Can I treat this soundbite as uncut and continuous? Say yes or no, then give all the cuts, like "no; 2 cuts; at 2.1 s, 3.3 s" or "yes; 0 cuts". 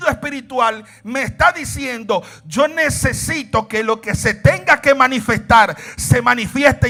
yes; 0 cuts